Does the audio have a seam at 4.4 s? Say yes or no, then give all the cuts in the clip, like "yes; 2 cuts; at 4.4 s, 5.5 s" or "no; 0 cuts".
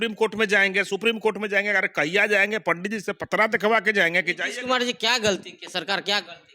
no; 0 cuts